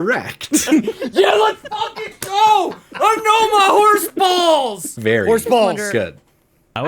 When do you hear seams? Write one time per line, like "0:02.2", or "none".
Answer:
0:04.9

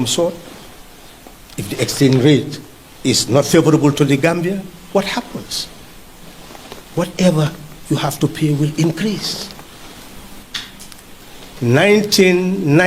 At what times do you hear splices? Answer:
0:10.2

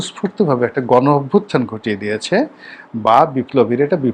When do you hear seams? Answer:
none

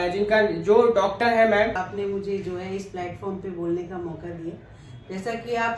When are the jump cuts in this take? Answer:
0:01.8

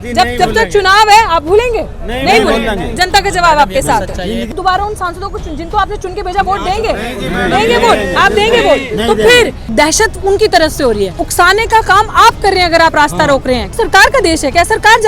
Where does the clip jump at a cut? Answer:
0:04.6
0:09.6
0:11.2
0:13.7

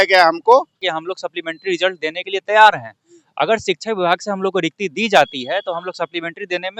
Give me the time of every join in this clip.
0:00.9

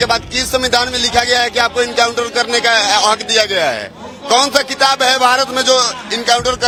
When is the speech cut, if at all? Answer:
none

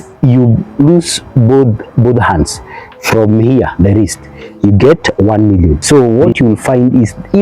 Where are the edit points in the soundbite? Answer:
0:05.8

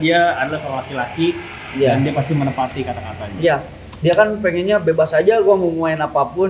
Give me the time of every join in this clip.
none

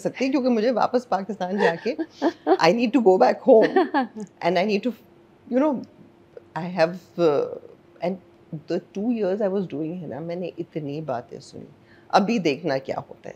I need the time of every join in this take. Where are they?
none

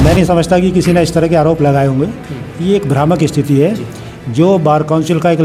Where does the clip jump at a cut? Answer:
none

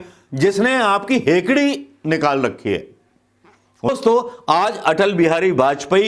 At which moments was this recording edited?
0:03.9

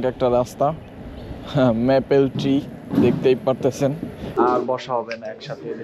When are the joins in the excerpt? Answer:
0:04.4

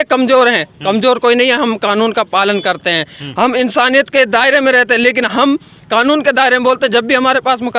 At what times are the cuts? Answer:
none

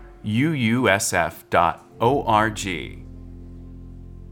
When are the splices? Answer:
0:02.9

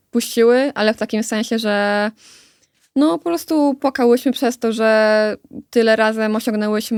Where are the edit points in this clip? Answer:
none

